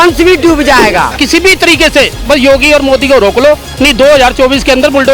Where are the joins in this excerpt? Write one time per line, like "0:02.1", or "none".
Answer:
0:01.2

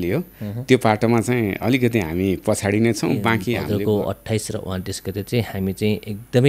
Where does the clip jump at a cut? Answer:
0:03.7

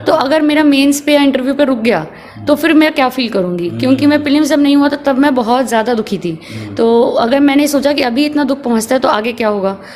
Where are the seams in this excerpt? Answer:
none

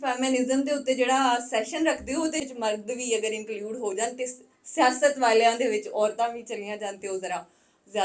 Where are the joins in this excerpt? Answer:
0:02.5

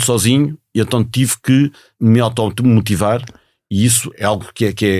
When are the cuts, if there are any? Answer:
0:01.9
0:04.0

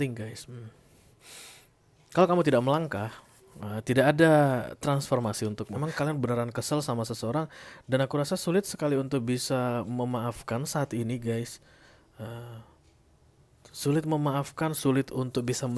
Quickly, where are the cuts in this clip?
0:05.8

